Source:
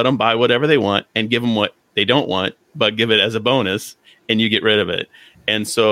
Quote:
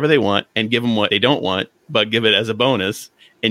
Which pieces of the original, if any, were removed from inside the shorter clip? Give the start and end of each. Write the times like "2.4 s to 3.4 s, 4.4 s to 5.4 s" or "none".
1.7 s to 2.0 s